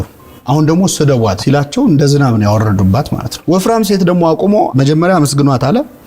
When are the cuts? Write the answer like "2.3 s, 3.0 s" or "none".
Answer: 1.4 s, 3.2 s